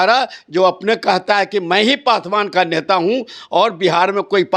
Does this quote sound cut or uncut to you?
uncut